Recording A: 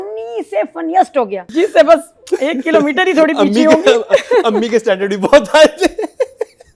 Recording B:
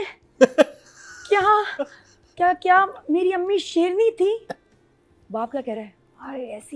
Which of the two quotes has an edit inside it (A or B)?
A